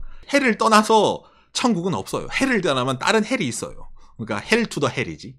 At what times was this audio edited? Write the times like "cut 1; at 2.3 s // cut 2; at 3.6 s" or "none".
none